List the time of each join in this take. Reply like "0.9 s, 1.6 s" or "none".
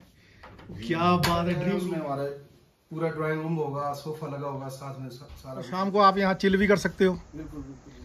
1.7 s, 5.6 s